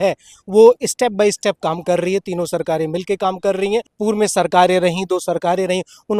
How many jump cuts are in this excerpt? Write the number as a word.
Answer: one